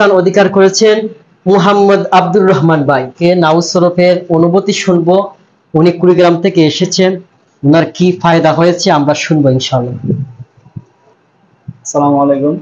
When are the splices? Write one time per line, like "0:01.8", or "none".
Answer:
0:03.1